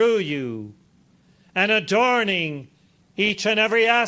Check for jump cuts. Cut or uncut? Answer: uncut